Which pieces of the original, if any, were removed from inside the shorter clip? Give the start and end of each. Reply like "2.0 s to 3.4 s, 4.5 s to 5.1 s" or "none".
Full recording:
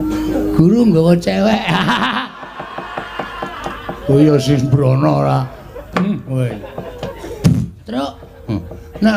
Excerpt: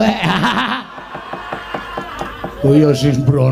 none